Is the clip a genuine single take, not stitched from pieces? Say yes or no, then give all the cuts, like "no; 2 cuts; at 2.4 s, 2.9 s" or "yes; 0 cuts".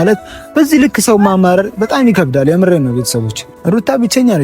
no; 1 cut; at 3.5 s